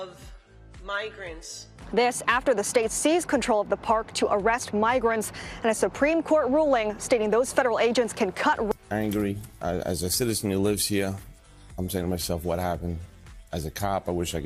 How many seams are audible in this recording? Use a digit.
0